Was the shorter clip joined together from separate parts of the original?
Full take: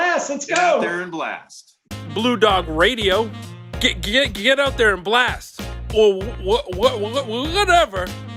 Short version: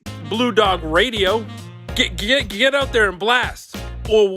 no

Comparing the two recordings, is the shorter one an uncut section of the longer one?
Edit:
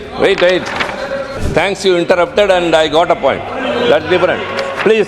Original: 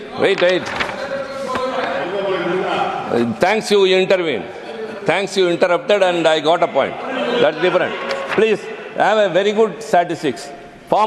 no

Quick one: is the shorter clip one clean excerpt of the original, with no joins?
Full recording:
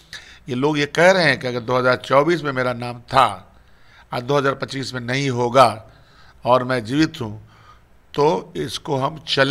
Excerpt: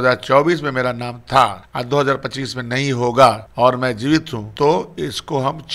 no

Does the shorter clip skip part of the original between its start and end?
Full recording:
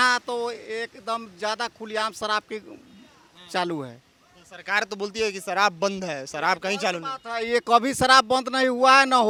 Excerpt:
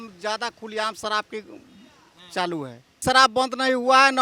yes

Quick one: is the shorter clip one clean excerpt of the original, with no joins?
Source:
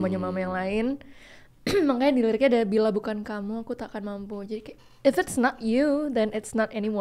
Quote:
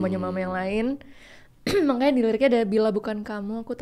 yes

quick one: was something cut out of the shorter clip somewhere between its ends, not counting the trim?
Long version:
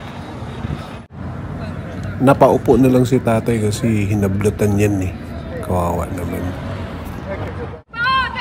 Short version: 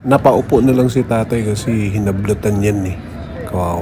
no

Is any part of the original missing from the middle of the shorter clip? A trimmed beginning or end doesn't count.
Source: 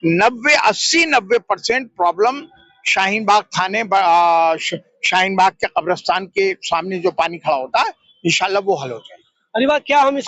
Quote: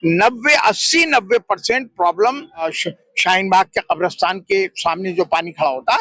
yes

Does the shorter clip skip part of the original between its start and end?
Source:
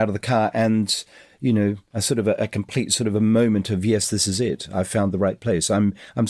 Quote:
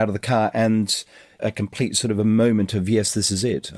yes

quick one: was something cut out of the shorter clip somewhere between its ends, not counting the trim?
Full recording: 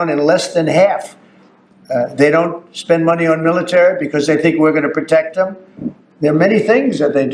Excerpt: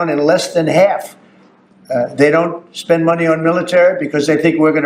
no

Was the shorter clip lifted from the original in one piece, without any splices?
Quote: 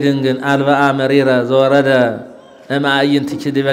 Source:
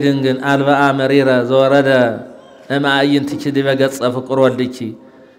yes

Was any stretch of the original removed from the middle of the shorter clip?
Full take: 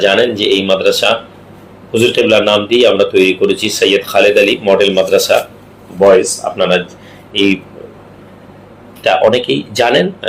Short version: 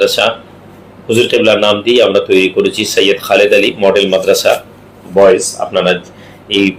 no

